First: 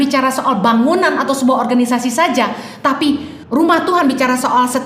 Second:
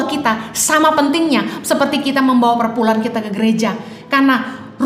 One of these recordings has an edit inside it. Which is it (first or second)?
first